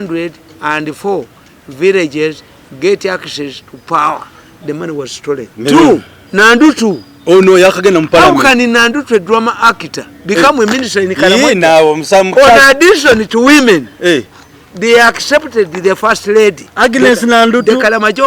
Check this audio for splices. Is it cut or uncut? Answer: cut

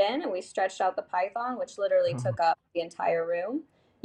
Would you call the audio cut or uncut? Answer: uncut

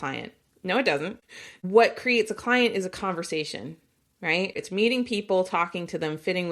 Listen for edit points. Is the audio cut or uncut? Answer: cut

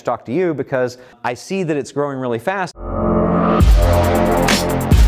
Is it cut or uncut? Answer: cut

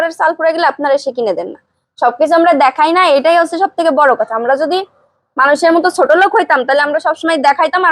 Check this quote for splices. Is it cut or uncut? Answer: uncut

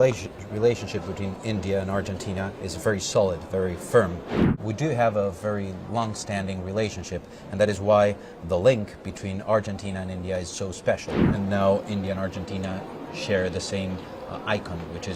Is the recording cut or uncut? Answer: cut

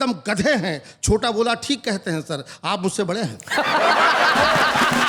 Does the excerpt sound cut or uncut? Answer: uncut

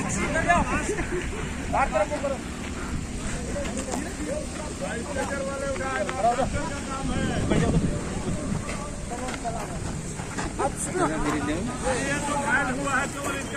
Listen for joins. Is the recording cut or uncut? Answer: uncut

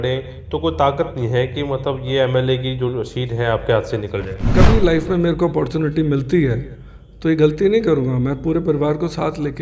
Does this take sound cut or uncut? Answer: cut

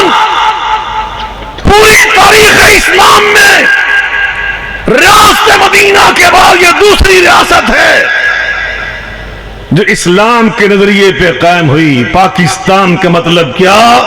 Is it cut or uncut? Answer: uncut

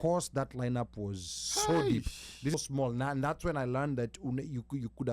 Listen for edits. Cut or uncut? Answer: cut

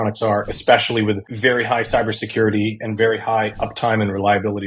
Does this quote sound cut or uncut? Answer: cut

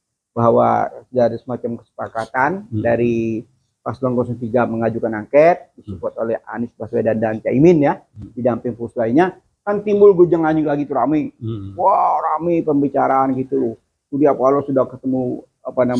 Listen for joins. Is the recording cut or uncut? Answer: uncut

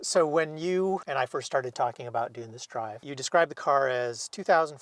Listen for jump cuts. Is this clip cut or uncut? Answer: cut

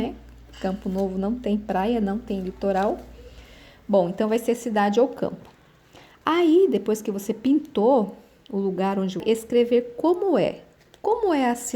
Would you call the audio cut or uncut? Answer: cut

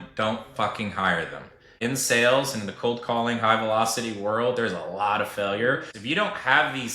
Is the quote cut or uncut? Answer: cut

